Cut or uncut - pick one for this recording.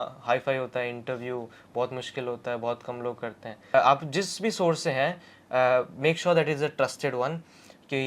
cut